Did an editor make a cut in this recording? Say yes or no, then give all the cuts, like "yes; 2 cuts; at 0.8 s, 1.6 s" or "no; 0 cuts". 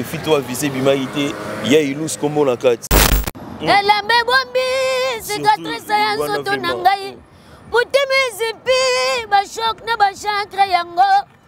yes; 1 cut; at 3.2 s